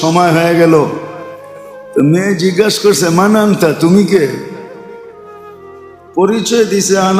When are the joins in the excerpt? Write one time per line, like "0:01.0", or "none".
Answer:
none